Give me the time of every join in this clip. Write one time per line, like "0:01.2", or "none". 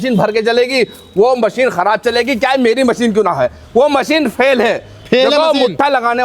none